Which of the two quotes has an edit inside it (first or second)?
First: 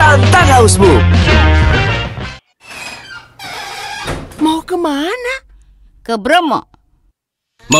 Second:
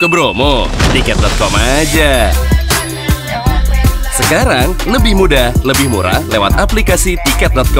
first